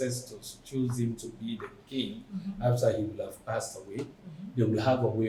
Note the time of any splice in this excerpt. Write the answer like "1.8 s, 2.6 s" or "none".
none